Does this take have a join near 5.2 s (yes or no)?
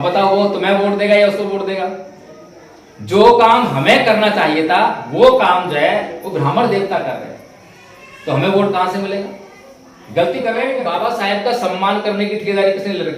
no